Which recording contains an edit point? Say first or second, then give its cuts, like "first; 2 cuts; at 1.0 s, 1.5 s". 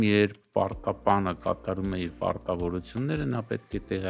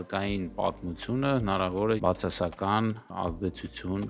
second; 2 cuts; at 2.0 s, 3.1 s